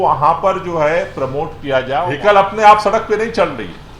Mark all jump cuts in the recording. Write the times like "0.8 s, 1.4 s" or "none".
2.1 s